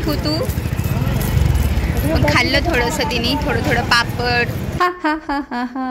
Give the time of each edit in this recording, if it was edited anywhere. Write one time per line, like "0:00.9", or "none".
0:04.6